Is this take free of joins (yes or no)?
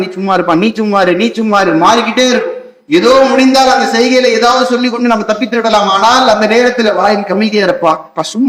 yes